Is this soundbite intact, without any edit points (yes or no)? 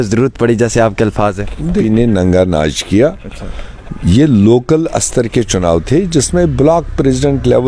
no